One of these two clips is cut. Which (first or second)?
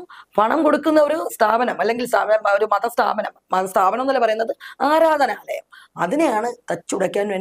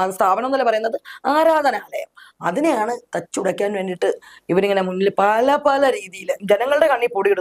second